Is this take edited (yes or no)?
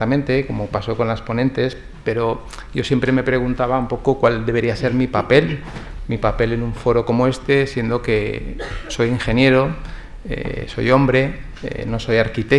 no